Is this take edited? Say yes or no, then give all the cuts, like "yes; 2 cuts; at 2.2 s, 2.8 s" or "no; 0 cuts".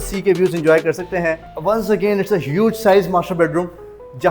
yes; 1 cut; at 1.5 s